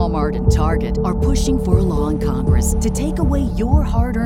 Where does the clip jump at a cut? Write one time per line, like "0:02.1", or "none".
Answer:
none